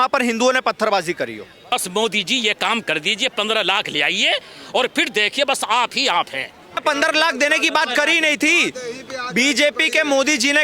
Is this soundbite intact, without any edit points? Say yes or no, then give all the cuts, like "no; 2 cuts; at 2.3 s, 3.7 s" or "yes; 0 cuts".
no; 2 cuts; at 1.7 s, 6.8 s